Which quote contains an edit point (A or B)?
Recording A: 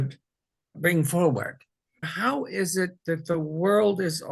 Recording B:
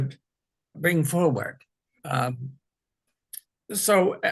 A